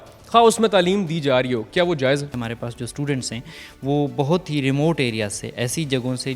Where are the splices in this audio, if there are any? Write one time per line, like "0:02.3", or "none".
0:02.3

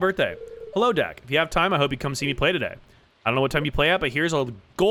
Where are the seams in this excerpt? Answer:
none

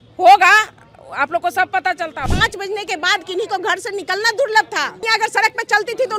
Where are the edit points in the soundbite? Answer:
0:02.3
0:05.0

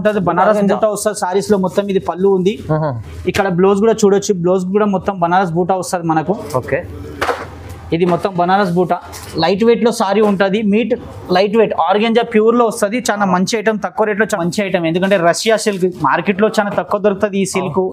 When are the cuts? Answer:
0:14.4

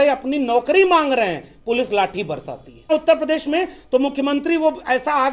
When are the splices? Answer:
0:02.9

